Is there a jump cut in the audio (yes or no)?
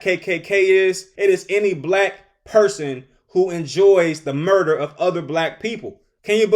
yes